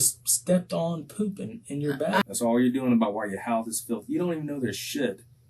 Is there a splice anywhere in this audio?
yes; 1 cut; at 2.2 s

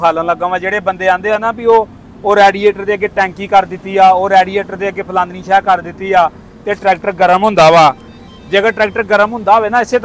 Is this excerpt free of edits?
yes; 0 cuts

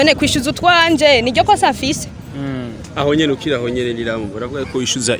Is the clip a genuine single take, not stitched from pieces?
yes; 0 cuts

